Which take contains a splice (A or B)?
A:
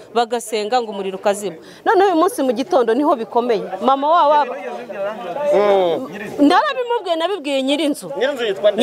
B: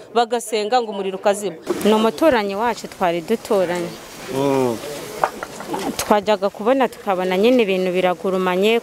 B